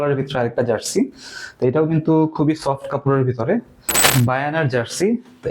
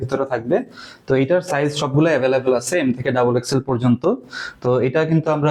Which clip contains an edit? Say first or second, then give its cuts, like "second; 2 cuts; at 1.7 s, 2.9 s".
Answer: first; 1 cut; at 4.0 s